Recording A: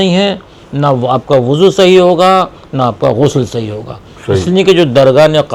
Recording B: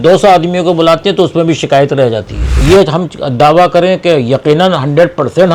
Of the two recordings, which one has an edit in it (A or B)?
B